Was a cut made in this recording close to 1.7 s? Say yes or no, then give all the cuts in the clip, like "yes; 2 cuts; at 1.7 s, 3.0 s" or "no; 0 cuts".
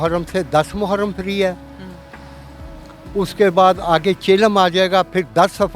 no; 0 cuts